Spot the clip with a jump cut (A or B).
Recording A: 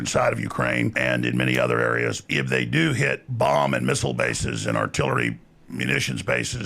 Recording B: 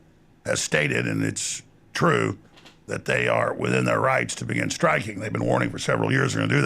A